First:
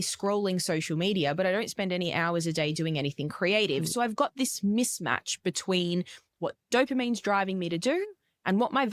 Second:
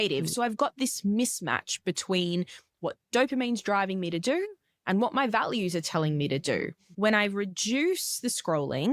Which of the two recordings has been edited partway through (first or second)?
second